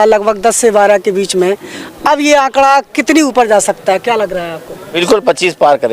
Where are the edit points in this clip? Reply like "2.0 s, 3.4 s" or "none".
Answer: 5.0 s